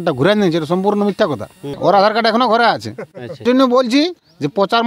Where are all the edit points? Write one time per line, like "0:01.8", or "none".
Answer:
0:01.7
0:03.4